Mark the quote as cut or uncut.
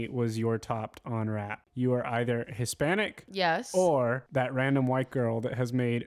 cut